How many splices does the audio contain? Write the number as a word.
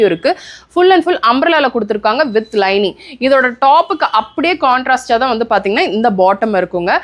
zero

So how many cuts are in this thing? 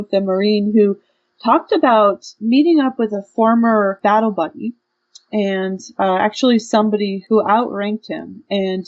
three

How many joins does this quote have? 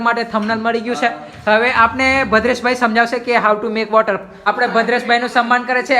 one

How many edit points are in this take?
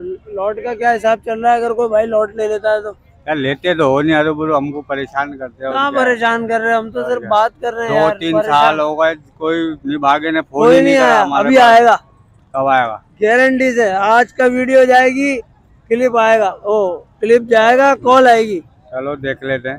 zero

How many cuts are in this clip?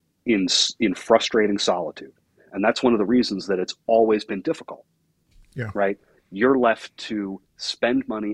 zero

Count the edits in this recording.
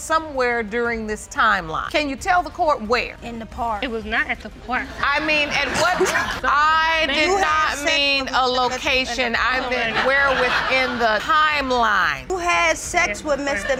zero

